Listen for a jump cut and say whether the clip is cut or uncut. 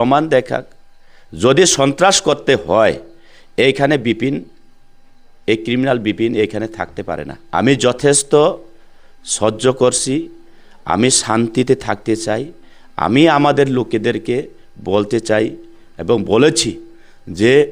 cut